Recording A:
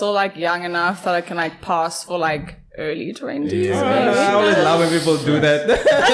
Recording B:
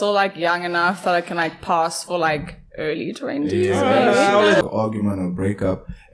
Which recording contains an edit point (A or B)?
B